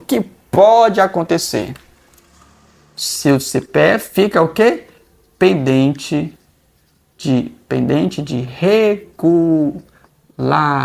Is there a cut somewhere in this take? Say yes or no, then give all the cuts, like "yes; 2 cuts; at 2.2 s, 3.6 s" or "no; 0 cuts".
no; 0 cuts